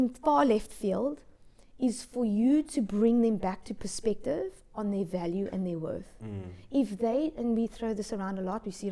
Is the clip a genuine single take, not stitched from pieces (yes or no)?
yes